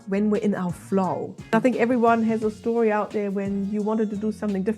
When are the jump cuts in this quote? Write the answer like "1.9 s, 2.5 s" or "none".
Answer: 1.5 s